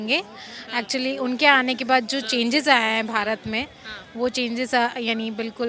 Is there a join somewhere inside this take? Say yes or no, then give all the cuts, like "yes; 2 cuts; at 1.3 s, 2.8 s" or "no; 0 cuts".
no; 0 cuts